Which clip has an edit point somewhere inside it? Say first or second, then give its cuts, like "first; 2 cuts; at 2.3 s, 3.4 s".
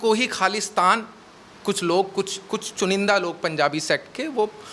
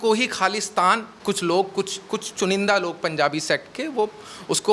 second; 1 cut; at 1.1 s